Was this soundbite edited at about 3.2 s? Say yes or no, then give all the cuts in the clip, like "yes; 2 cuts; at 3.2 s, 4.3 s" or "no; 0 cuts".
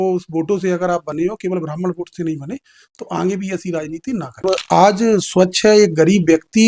no; 1 cut; at 4.4 s